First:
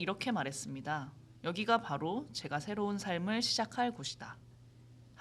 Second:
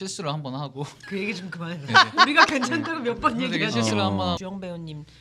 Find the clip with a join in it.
second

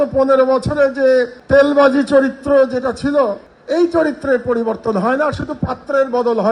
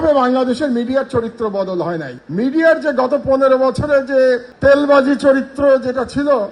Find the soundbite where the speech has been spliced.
second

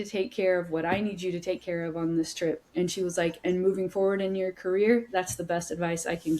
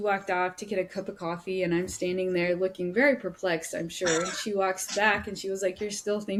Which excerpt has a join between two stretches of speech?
first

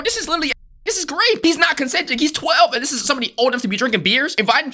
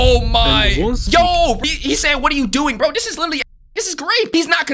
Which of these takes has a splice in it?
second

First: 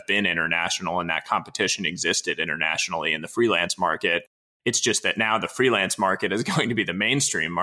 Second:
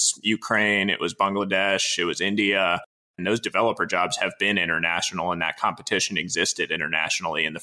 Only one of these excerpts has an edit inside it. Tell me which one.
second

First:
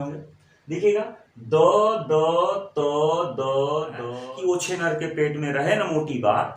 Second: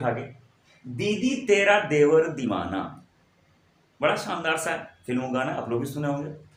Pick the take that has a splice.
first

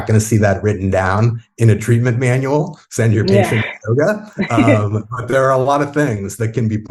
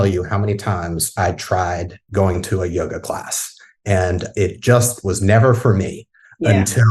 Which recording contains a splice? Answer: second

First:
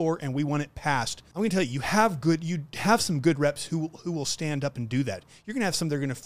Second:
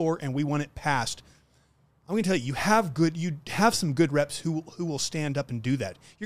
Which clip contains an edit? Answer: first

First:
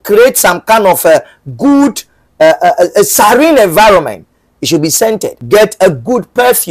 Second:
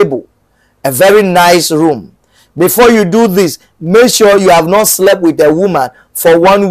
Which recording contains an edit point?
first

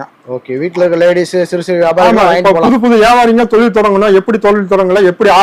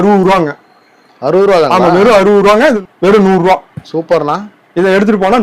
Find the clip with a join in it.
second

